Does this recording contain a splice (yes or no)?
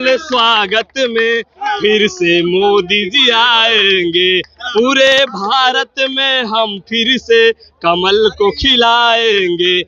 no